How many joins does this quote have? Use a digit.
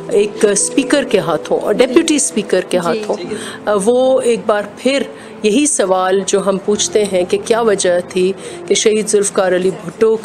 0